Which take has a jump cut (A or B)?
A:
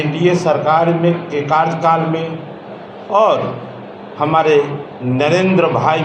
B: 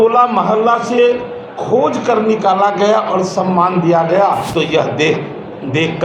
B